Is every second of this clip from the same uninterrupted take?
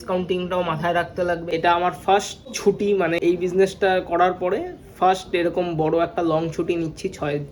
no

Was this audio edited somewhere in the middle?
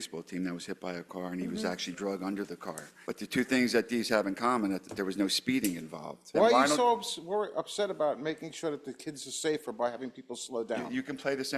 yes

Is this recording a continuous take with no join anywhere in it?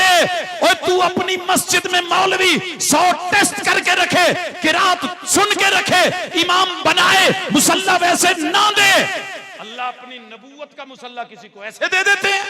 yes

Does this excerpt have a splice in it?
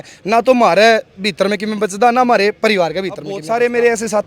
yes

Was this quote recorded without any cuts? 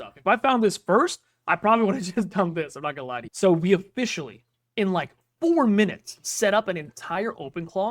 no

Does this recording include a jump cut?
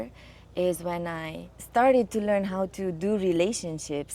yes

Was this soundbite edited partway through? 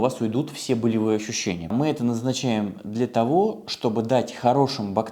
yes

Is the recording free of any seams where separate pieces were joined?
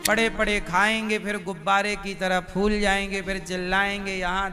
yes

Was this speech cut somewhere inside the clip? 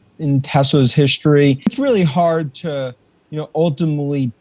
yes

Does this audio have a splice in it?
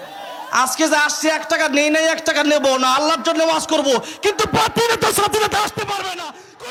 no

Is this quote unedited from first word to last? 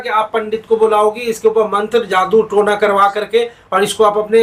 yes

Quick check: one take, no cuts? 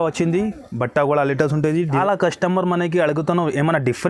no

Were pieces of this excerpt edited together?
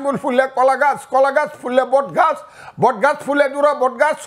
no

